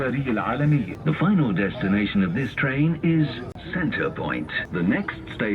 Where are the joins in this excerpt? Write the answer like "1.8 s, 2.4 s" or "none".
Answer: 0.9 s, 3.6 s, 4.6 s